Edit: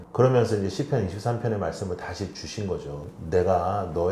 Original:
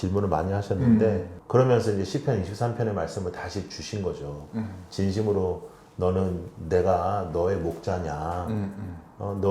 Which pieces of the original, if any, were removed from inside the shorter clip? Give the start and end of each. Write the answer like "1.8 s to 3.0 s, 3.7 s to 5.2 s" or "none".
4.4 s to 6.5 s

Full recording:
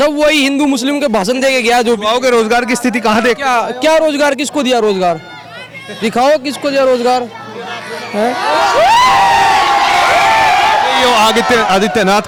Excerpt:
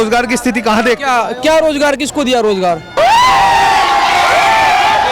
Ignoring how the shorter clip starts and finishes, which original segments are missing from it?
5.3 s to 8.7 s

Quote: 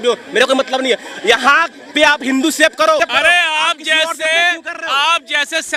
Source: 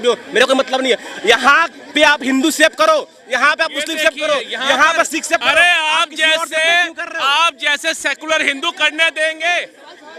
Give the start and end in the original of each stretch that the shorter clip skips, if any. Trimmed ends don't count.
3.0 s to 5.3 s

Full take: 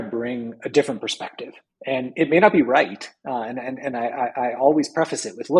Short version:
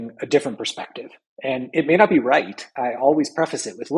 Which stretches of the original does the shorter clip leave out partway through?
3.2 s to 4.3 s

